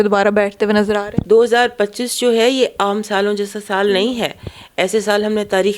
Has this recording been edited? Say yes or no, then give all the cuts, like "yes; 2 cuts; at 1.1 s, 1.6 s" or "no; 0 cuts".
yes; 1 cut; at 1.1 s